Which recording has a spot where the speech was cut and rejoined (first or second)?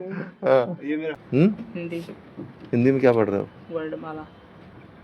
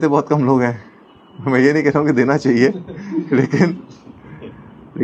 first